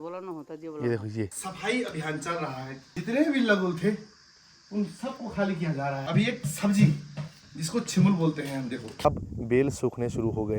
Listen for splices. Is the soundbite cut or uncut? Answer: cut